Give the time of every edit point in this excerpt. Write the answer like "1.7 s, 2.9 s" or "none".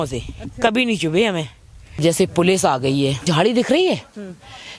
2.0 s, 3.2 s

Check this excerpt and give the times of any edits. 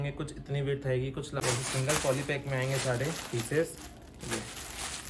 1.4 s

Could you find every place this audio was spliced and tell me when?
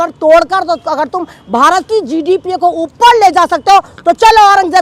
none

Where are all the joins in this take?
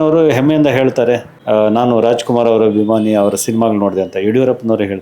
1.3 s

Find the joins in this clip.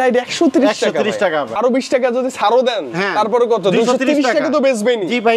1.5 s

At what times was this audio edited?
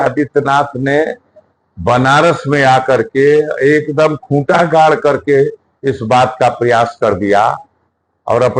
none

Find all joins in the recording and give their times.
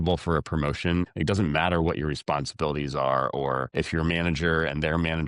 1.1 s, 3.7 s

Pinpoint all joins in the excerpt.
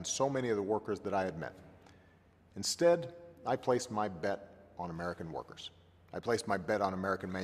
none

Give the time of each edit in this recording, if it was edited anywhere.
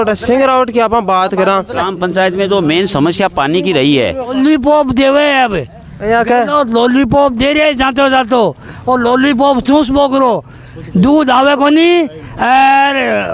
1.9 s, 4.3 s

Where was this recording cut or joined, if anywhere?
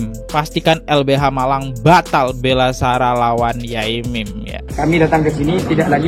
4.6 s

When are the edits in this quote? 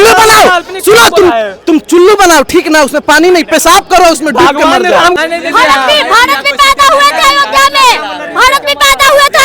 5.2 s

